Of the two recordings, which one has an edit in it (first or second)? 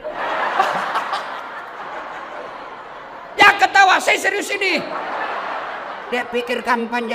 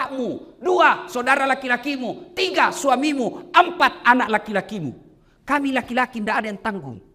first